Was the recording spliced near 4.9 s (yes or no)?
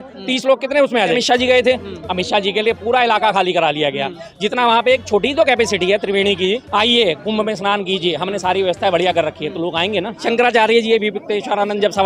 no